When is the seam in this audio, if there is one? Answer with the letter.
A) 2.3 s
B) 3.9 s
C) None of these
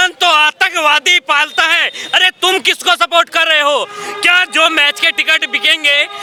C